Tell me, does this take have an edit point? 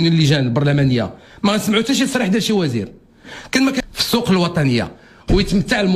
yes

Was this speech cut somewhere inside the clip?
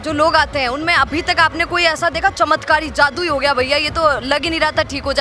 no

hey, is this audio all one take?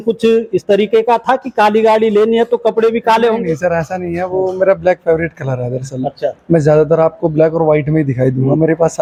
yes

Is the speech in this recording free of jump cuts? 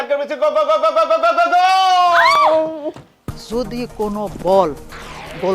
no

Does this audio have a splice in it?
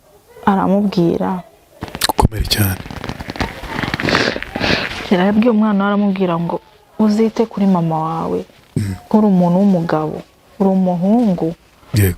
yes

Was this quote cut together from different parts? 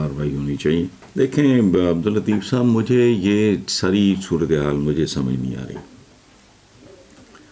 yes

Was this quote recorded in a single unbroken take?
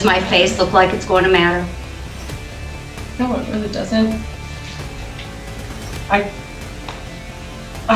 yes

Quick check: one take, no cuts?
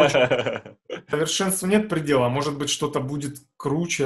no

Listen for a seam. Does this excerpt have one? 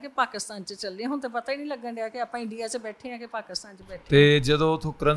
no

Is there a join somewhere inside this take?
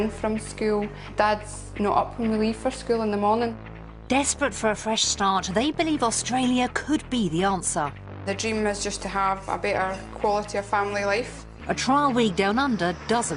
yes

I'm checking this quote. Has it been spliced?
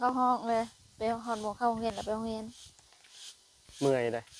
no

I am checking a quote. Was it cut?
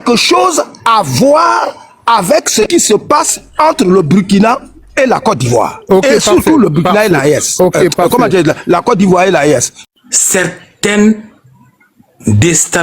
yes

